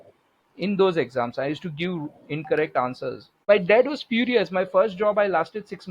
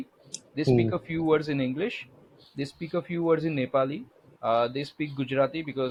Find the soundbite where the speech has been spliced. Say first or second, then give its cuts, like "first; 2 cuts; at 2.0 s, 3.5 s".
first; 1 cut; at 3.4 s